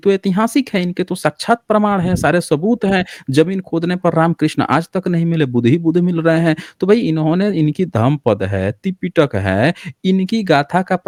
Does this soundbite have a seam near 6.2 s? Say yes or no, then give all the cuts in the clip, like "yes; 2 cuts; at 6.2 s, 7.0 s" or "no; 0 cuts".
no; 0 cuts